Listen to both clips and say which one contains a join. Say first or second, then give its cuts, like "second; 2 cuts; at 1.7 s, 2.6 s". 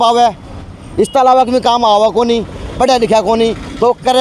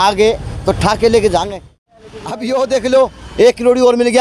second; 1 cut; at 1.7 s